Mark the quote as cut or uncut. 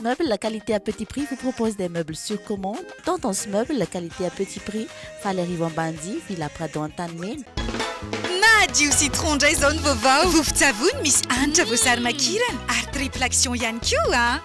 cut